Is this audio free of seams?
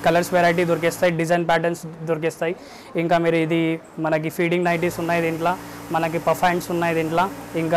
yes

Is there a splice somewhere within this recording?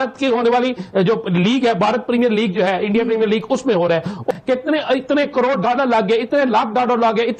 no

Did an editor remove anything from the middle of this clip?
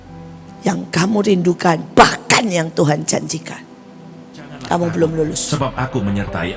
yes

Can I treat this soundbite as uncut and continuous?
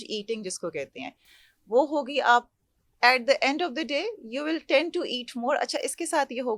yes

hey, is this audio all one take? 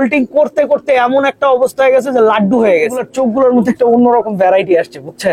no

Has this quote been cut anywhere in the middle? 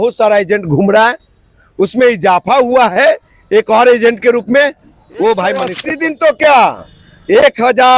yes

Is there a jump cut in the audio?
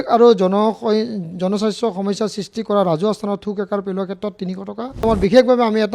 yes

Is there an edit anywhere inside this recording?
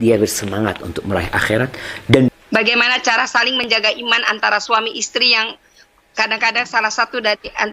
yes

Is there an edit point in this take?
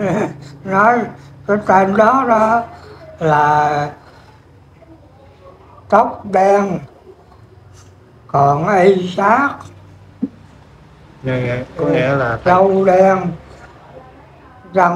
no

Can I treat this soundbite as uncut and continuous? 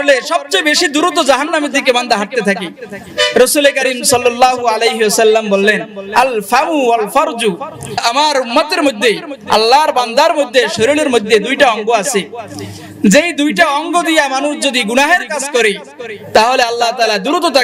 yes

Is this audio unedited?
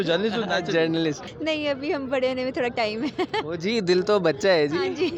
no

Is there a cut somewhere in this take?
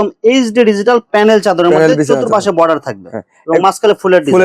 no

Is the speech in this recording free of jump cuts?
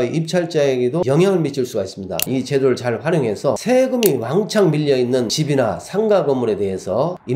no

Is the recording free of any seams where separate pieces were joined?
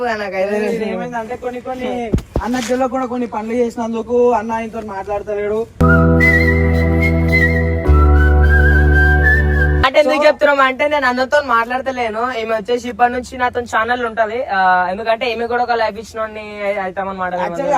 no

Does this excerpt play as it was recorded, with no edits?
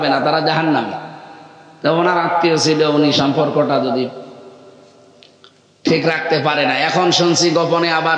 yes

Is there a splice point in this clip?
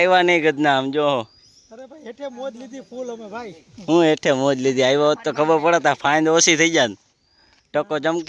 no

